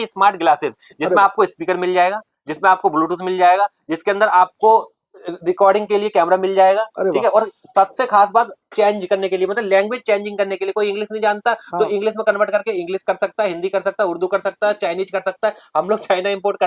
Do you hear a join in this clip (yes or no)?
no